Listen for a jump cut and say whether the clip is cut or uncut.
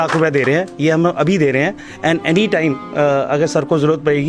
uncut